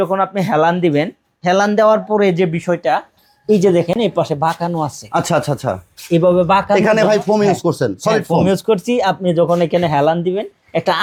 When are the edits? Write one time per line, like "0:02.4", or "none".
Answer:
none